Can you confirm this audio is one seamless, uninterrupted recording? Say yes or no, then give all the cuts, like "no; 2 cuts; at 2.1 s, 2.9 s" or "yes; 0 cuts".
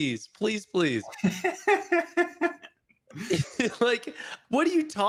yes; 0 cuts